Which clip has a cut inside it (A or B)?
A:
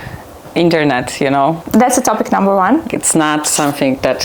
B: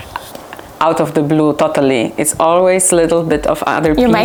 A